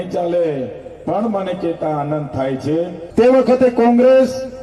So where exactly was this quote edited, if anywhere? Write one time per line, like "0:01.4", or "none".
0:03.0